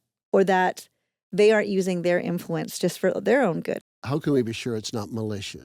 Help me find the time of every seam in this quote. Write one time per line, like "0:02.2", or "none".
0:03.8